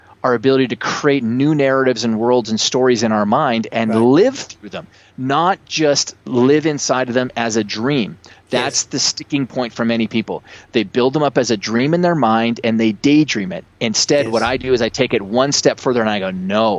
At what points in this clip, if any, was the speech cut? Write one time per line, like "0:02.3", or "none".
none